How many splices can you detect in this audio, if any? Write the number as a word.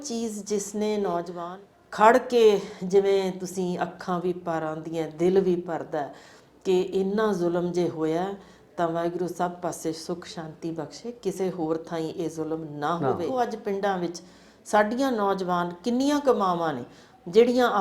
two